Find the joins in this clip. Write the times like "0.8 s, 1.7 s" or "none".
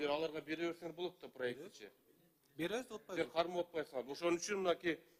none